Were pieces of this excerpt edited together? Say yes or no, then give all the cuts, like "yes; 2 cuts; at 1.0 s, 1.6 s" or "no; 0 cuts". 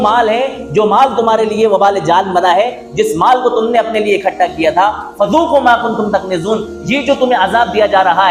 no; 0 cuts